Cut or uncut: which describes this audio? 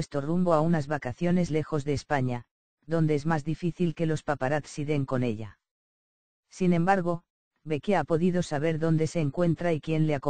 cut